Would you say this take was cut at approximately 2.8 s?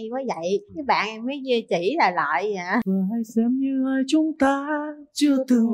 yes; 1 cut; at 2.8 s

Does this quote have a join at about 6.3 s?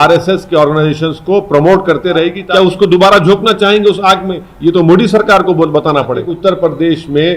yes; 2 cuts; at 2.4 s, 6.3 s

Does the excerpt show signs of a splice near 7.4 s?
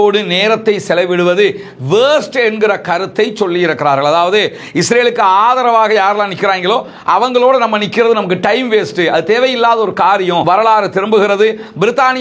no; 1 cut; at 10.4 s

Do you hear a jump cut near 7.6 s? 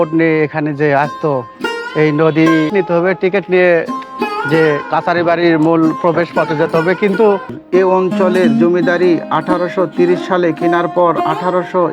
yes; 2 cuts; at 2.7 s, 7.6 s

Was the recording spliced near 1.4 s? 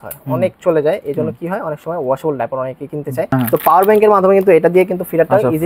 no; 1 cut; at 3.3 s

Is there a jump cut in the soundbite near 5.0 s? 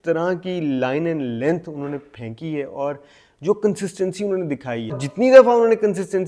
yes; 1 cut; at 5.0 s

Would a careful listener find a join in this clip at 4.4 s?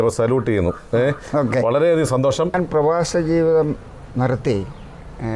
no; 1 cut; at 2.5 s

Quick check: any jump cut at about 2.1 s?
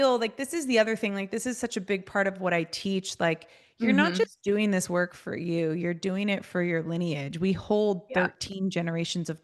no; 0 cuts

